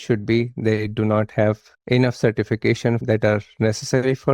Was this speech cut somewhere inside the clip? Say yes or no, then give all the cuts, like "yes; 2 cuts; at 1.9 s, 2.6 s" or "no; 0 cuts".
yes; 2 cuts; at 1.7 s, 3.0 s